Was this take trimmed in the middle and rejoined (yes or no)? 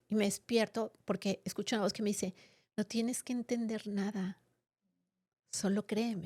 no